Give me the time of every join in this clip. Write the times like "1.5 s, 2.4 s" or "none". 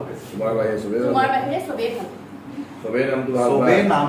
none